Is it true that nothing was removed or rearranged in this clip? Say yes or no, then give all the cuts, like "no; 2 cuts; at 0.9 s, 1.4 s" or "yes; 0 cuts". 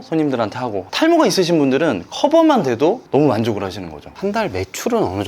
no; 1 cut; at 4.1 s